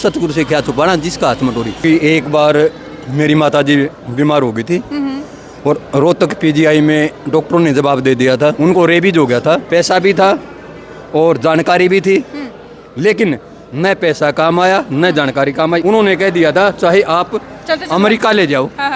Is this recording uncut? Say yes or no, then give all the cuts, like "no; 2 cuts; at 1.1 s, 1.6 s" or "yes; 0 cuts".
no; 4 cuts; at 1.8 s, 8.6 s, 9.6 s, 15.8 s